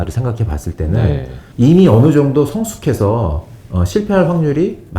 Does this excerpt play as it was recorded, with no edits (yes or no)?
no